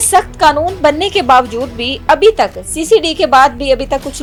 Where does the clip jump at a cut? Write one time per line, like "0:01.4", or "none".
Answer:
none